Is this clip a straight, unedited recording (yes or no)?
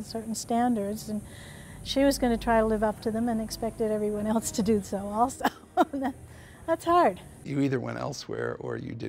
no